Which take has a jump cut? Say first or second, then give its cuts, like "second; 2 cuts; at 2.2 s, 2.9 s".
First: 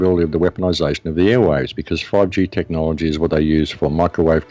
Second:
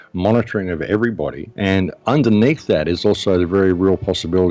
second; 1 cut; at 1.4 s